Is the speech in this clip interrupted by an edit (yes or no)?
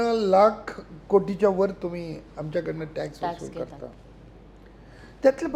no